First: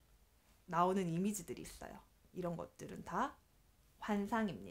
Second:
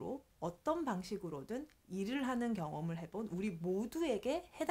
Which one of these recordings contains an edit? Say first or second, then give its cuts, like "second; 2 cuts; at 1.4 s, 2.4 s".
first; 1 cut; at 2.2 s